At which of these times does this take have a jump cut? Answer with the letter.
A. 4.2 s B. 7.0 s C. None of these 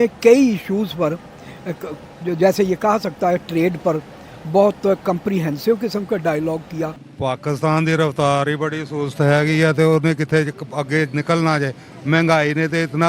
B